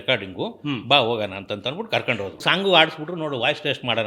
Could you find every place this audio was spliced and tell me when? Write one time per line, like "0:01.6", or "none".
0:02.4